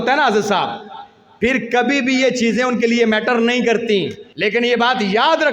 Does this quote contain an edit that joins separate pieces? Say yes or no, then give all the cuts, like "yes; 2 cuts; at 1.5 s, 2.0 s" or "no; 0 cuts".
yes; 1 cut; at 4.2 s